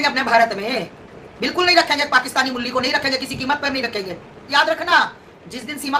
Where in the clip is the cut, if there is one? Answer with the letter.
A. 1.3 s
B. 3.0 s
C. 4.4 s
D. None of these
C